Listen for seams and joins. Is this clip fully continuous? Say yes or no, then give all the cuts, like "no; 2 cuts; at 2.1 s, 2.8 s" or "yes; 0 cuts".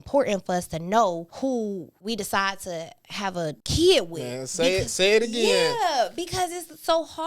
no; 2 cuts; at 1.6 s, 3.6 s